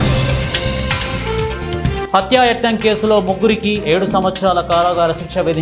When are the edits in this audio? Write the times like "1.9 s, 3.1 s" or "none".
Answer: 2.0 s